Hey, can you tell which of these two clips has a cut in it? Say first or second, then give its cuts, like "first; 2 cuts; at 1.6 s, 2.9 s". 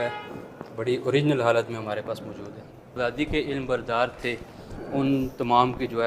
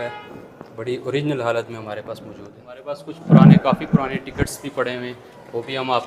first; 1 cut; at 2.9 s